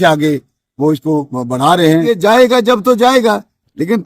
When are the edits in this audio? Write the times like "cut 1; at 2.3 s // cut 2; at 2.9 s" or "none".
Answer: cut 1; at 2.1 s